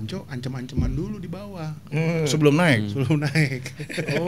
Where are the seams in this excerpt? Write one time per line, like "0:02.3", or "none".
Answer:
none